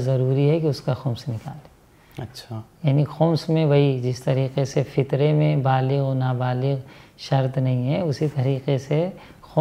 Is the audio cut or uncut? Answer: uncut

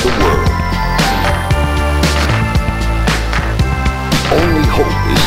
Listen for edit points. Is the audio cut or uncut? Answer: uncut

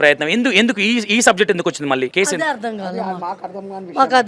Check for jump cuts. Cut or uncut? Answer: cut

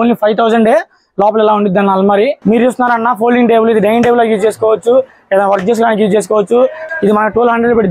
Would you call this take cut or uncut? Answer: cut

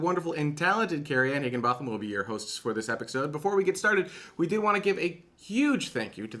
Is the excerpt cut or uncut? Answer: cut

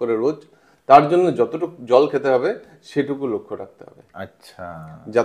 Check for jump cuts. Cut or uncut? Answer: uncut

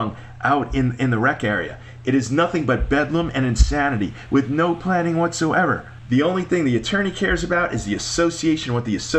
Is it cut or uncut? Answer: cut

